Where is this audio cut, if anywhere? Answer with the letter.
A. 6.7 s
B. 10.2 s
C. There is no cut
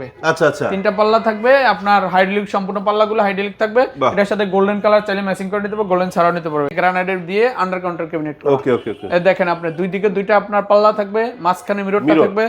A